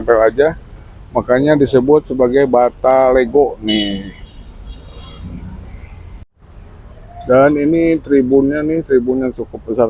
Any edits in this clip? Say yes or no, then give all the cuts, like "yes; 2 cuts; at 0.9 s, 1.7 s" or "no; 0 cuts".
yes; 1 cut; at 6.3 s